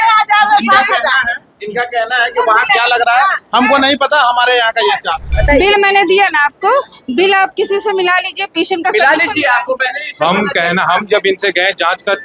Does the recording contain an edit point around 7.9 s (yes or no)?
no